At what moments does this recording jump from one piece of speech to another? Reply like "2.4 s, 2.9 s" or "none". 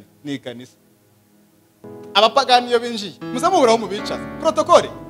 1.8 s